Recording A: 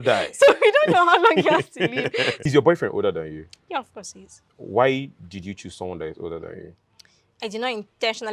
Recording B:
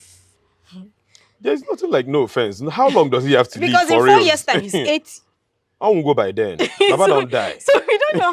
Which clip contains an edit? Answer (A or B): A